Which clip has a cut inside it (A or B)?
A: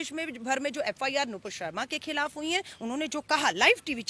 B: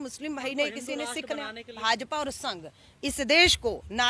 B